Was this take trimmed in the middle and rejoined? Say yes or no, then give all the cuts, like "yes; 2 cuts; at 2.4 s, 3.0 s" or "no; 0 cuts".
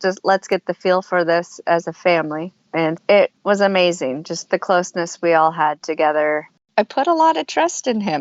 yes; 2 cuts; at 3.0 s, 6.6 s